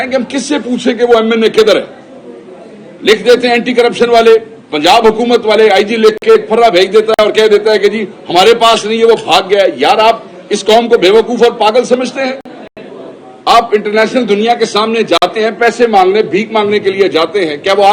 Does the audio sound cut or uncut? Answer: uncut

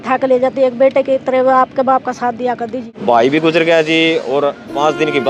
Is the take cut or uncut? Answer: cut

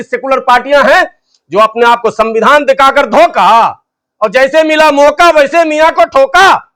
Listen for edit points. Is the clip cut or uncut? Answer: uncut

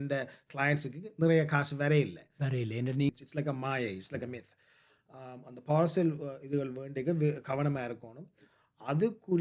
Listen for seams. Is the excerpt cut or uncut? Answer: cut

